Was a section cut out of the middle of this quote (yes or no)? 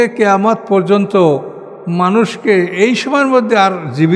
no